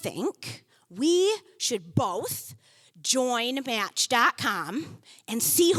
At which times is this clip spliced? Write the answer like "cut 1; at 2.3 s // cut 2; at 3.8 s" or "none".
none